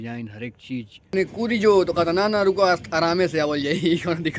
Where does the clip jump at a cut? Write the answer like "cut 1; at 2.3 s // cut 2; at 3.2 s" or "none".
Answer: cut 1; at 1.1 s